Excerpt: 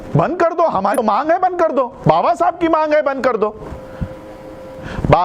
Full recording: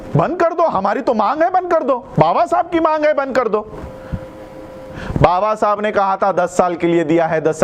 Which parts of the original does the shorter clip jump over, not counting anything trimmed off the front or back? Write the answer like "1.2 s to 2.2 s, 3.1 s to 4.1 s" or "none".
0.9 s to 1.1 s

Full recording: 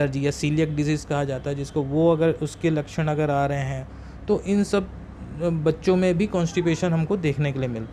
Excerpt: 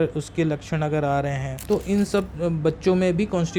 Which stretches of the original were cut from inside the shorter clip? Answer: 3.7 s to 4.1 s, 4.9 s to 5.3 s

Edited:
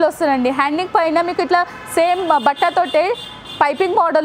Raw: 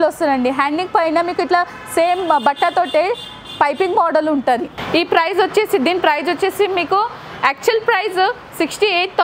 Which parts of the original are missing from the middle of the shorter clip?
none

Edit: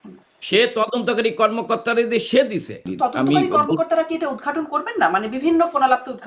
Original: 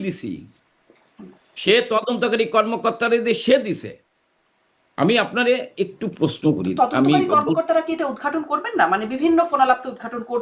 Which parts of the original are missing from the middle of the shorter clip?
4.0 s to 6.7 s

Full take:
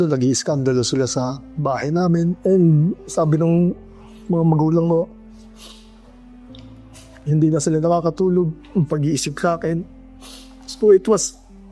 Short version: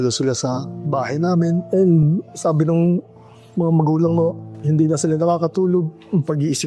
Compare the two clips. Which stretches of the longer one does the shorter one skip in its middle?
5.2 s to 7.1 s

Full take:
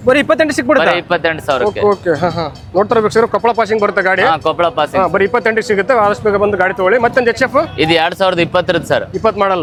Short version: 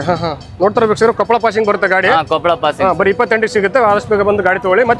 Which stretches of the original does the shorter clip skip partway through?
none

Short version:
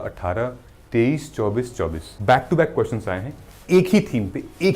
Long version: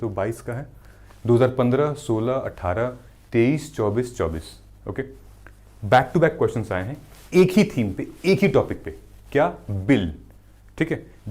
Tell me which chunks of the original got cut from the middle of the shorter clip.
4.5 s to 5.7 s

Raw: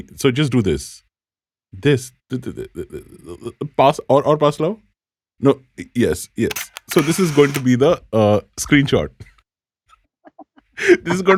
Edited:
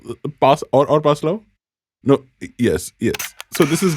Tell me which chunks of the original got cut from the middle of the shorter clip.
none

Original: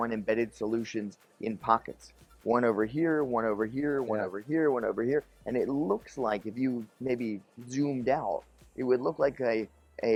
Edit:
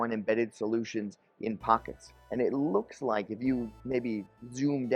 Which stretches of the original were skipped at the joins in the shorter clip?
2.2 s to 5.4 s

